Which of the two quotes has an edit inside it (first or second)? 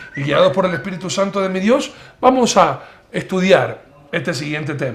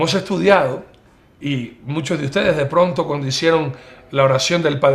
first